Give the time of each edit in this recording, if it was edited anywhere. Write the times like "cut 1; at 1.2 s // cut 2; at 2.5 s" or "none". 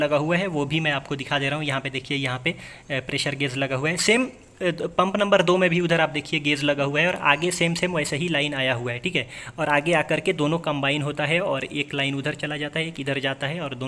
none